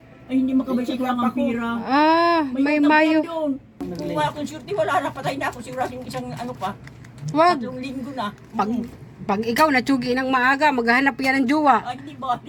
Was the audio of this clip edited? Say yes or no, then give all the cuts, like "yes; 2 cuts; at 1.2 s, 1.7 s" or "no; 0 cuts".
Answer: yes; 1 cut; at 3.8 s